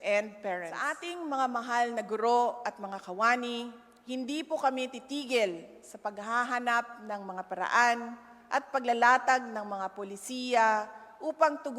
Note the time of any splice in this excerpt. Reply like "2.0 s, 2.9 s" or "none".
1.0 s